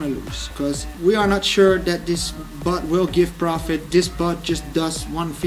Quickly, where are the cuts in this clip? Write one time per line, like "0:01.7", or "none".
none

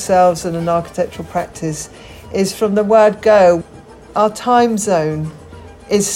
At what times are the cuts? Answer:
0:04.1

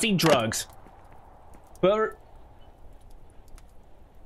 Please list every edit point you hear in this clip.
none

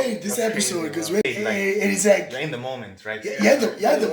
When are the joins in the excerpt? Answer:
0:01.2

